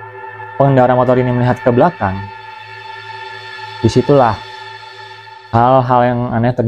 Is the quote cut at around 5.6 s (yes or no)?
no